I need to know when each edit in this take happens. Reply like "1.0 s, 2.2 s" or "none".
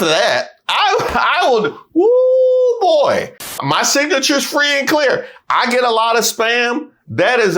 3.6 s